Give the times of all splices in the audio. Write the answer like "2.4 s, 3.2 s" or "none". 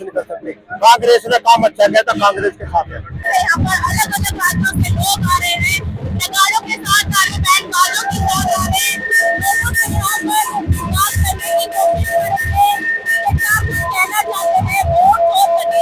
3.3 s